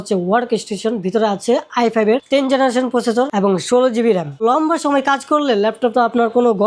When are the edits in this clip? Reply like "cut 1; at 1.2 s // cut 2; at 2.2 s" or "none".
cut 1; at 4.4 s